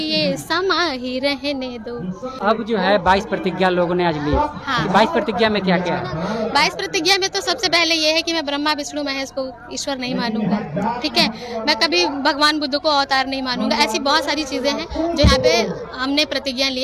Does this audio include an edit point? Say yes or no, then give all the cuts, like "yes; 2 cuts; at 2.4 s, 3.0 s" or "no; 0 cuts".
yes; 1 cut; at 2.4 s